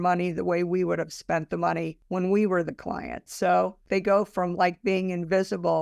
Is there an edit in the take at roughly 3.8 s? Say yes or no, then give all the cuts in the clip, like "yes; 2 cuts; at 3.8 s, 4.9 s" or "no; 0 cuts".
yes; 2 cuts; at 2.0 s, 3.8 s